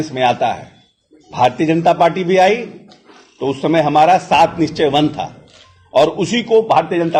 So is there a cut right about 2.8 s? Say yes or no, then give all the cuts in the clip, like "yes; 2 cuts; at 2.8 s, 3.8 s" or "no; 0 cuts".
no; 0 cuts